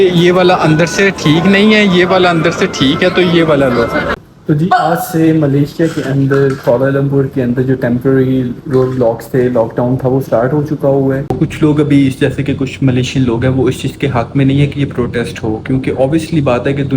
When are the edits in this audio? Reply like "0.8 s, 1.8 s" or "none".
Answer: 4.1 s, 11.3 s